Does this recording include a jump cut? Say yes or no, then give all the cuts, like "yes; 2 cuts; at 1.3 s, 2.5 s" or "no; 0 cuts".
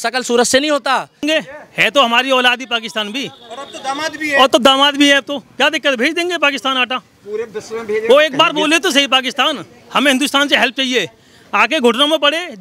yes; 1 cut; at 1.2 s